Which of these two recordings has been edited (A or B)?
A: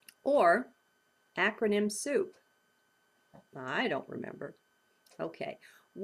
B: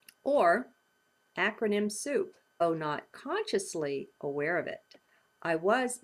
A